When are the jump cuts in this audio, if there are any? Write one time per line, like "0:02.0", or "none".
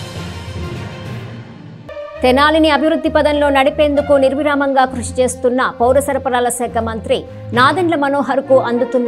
0:01.8